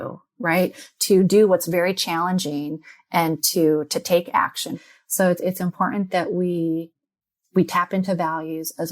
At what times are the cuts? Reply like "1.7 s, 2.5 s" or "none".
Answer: 4.7 s